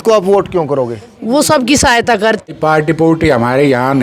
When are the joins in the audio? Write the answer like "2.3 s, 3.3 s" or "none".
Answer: 2.5 s